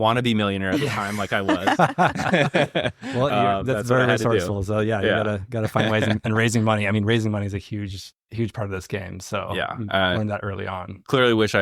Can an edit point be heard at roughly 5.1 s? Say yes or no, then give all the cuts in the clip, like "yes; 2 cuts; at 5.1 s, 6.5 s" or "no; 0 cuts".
no; 0 cuts